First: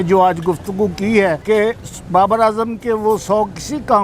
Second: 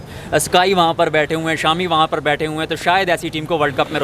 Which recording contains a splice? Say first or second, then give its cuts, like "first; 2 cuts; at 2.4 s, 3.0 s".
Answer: first; 1 cut; at 1.4 s